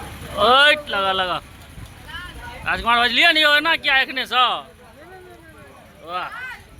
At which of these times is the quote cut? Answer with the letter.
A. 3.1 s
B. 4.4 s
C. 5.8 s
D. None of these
D